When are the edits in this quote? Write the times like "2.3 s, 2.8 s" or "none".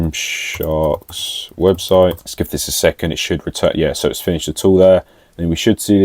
2.3 s